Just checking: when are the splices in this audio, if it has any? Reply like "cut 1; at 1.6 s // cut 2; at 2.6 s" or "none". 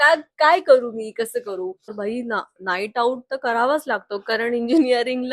cut 1; at 2.0 s